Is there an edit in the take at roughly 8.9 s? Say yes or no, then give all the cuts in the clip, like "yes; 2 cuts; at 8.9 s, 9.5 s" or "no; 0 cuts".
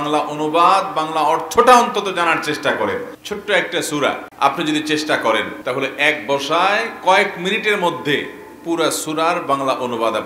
no; 3 cuts; at 3.2 s, 4.3 s, 5.5 s